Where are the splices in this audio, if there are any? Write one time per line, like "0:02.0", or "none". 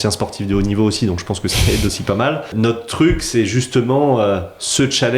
0:02.5